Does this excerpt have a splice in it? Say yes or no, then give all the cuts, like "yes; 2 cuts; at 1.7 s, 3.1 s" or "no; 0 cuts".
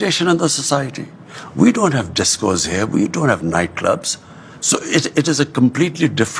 no; 0 cuts